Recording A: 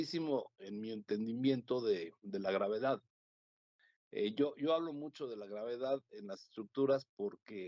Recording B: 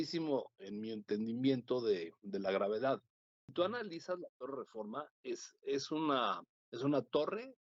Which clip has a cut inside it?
B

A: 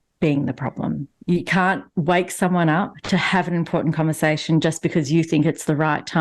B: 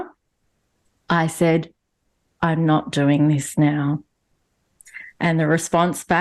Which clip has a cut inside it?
A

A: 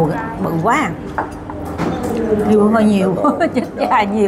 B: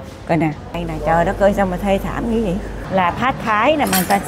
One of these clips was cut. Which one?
B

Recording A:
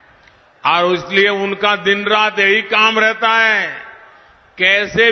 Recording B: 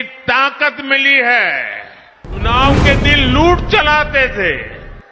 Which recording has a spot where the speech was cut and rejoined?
B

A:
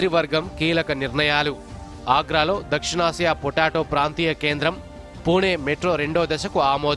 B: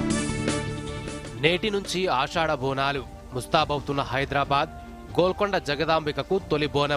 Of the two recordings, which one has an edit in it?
B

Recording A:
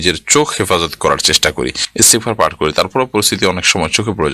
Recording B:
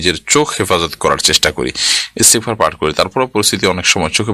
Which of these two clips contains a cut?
A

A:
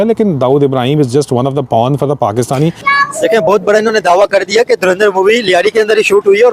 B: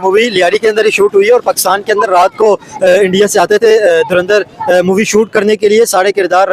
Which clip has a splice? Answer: A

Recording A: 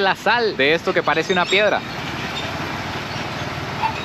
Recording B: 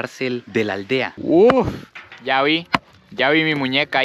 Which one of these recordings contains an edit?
B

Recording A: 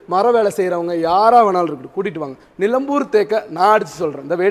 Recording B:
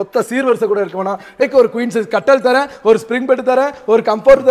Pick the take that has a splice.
B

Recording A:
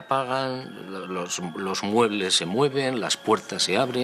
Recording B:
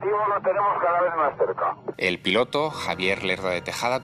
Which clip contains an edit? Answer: B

